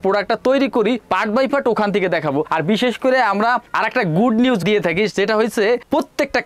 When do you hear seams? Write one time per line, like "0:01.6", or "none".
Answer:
none

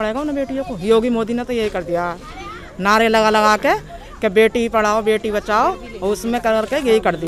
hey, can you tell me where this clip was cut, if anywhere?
none

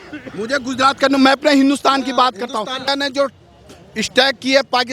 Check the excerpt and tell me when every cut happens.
0:02.9

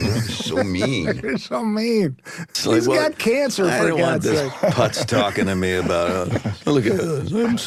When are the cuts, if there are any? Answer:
none

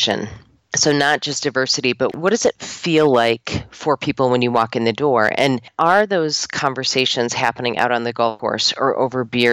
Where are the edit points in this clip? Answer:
0:05.7
0:08.4

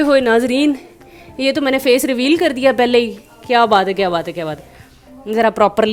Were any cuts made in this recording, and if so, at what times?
none

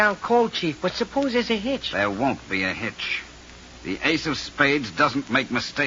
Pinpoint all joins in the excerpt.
none

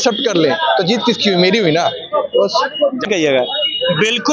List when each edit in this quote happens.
none

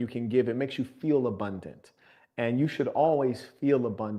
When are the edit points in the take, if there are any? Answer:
none

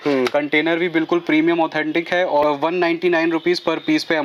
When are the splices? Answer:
none

